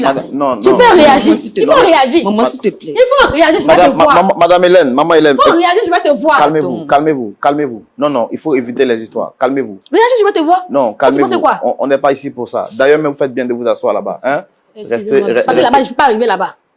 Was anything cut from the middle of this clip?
no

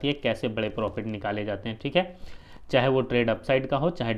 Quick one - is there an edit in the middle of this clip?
no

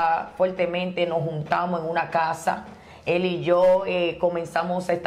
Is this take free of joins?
yes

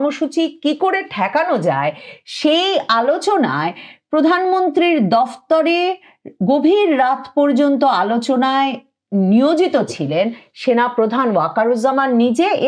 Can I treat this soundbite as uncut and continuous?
yes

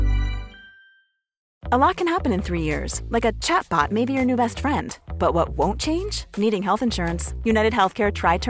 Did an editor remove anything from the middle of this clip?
yes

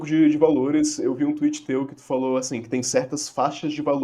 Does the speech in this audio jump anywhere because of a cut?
no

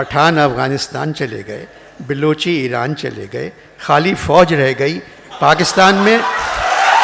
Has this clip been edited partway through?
no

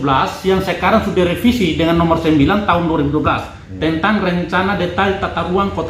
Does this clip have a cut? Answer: no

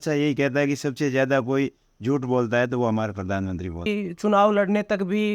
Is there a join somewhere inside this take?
yes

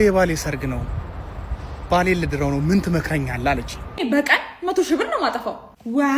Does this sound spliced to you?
yes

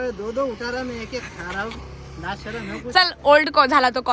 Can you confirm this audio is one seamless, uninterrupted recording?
yes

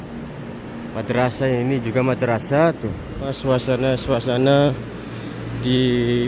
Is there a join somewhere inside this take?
yes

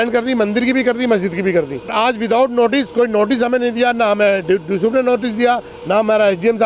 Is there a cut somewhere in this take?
yes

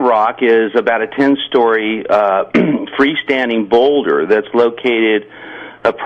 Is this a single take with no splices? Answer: no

